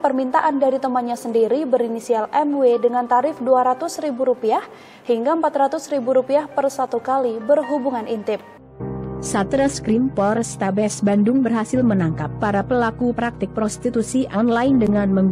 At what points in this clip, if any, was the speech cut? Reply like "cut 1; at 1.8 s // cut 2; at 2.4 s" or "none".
none